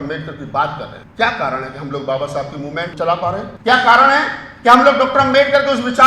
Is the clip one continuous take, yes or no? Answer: no